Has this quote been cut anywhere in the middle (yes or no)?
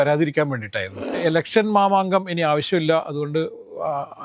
yes